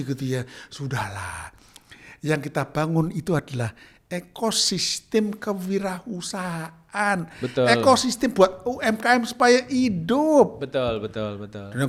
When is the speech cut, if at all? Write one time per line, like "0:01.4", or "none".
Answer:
none

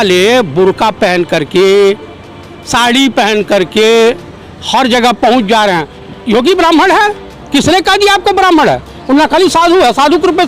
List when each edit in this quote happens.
0:05.9

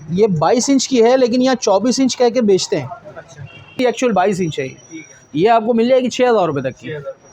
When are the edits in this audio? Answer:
0:03.8

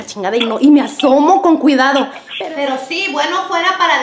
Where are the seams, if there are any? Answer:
0:02.2

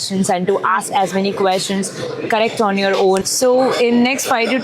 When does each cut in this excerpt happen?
0:03.2

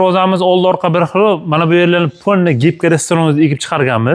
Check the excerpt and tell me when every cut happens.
none

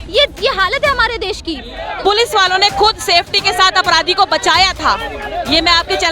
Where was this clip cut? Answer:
0:01.8

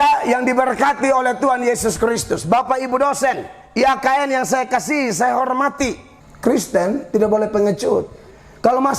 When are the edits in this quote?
0:06.1

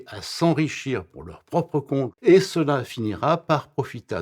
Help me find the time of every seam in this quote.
0:02.1

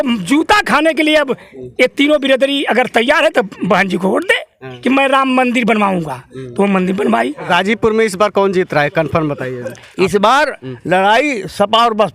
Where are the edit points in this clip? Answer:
0:04.7
0:07.4

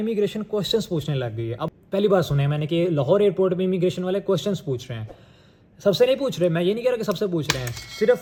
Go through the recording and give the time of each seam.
none

